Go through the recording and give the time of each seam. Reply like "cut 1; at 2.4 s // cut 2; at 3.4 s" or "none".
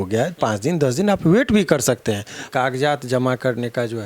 cut 1; at 2.4 s